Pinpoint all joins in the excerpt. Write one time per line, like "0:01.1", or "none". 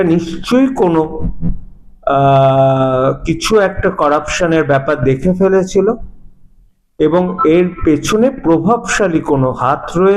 none